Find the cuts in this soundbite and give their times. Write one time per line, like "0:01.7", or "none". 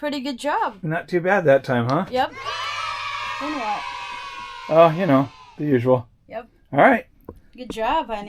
none